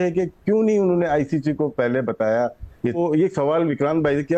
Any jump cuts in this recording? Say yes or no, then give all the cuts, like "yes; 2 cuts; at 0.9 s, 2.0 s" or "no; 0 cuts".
yes; 1 cut; at 3.0 s